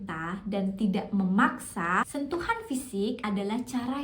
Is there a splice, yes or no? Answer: yes